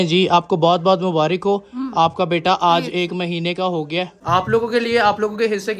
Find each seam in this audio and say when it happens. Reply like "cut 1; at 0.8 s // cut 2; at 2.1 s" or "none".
cut 1; at 4.2 s